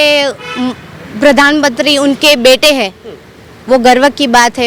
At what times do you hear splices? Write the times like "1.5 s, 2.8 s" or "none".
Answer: none